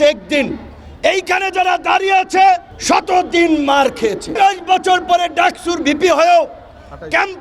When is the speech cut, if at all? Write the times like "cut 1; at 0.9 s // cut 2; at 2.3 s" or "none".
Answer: cut 1; at 2.7 s // cut 2; at 4.3 s